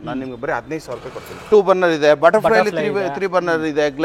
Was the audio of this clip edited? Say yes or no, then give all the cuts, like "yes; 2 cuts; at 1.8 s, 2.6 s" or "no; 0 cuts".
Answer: yes; 1 cut; at 1.4 s